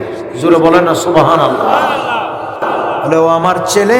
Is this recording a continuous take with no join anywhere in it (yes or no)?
no